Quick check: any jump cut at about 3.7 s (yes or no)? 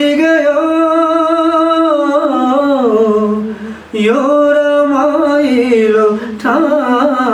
no